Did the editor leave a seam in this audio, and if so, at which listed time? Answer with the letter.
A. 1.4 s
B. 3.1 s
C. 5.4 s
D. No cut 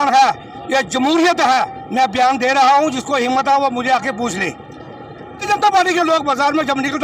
C